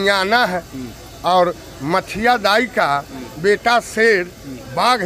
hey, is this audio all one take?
yes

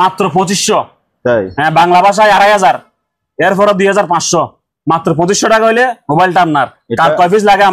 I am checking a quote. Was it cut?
no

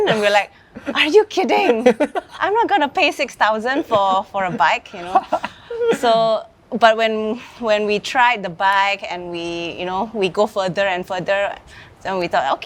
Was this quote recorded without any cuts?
yes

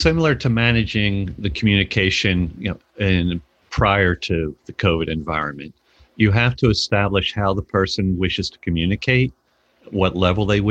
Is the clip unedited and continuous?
yes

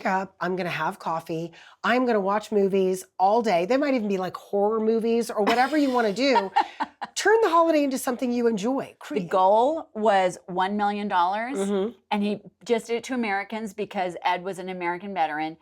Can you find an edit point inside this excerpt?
yes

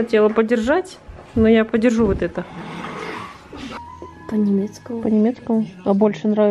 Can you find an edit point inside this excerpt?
yes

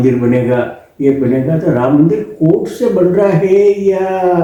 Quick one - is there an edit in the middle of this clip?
no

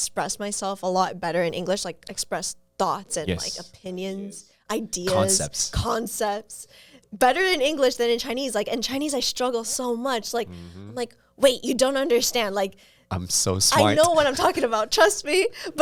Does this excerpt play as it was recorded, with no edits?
yes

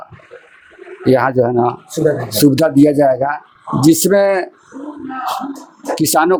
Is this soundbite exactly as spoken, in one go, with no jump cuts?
yes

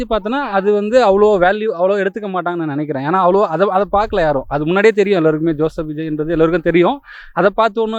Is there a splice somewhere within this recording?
no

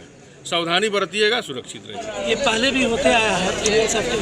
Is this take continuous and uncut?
no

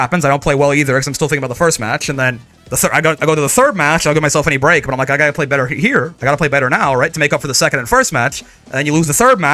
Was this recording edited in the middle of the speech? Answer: no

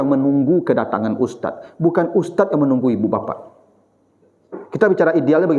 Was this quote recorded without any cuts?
yes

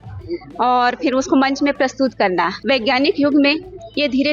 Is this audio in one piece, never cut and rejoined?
no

